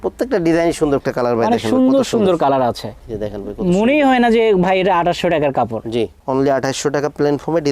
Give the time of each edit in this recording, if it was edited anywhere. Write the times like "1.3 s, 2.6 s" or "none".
1.0 s, 6.2 s